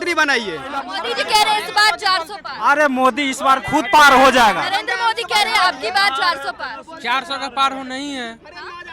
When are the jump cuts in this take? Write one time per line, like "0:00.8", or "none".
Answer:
0:00.9
0:04.6